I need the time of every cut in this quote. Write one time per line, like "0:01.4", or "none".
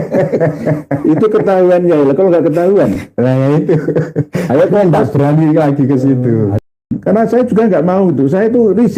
0:06.9